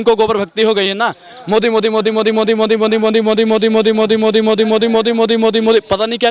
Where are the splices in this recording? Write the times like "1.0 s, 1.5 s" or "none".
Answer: none